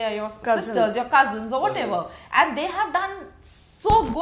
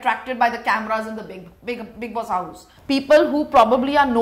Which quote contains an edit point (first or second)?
second